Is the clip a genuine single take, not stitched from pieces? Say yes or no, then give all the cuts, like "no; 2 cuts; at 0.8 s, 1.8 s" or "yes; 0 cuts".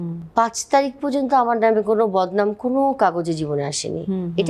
yes; 0 cuts